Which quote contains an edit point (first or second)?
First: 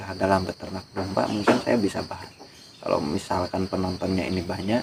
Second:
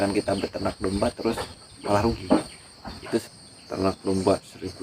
second